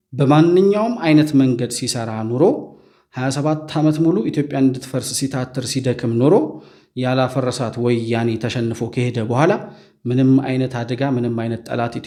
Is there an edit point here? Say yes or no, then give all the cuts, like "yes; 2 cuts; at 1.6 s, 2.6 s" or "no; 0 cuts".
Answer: no; 0 cuts